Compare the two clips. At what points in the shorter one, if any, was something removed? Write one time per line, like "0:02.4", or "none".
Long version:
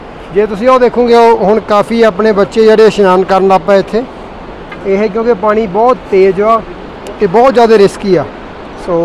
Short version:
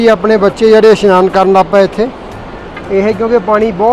none